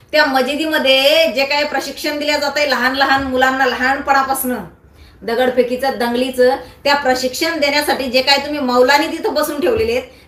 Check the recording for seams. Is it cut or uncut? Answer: uncut